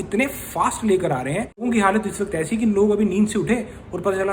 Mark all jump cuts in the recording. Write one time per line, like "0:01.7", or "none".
0:01.6